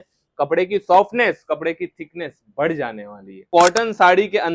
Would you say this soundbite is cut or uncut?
cut